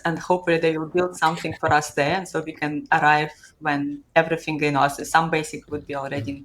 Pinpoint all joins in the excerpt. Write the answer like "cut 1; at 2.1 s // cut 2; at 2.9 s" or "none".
none